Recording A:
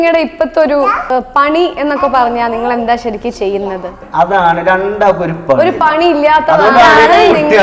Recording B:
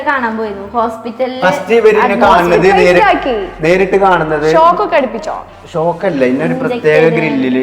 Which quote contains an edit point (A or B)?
A